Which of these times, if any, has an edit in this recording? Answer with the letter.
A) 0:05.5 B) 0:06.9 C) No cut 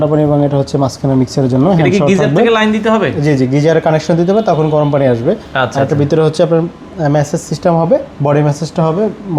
C